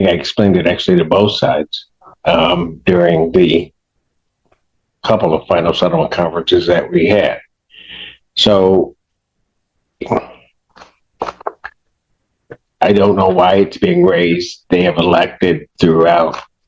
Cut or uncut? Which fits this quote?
uncut